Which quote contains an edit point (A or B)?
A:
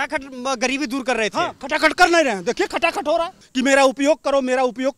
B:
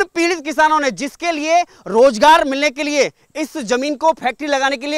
A